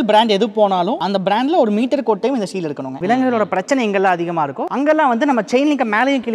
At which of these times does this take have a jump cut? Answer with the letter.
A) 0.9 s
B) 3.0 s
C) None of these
B